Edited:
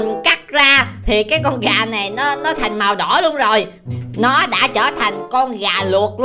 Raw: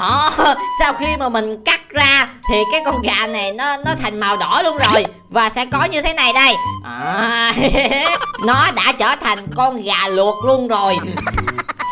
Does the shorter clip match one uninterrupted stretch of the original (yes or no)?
no